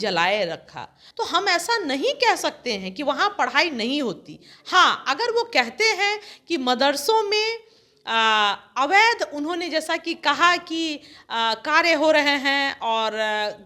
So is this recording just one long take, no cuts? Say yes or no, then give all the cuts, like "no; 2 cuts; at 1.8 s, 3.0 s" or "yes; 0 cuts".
no; 1 cut; at 1.0 s